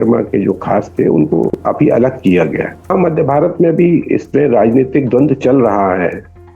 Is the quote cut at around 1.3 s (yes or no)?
no